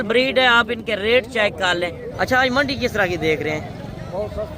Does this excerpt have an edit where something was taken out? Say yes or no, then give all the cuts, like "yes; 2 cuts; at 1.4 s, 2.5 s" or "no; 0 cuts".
yes; 1 cut; at 2.0 s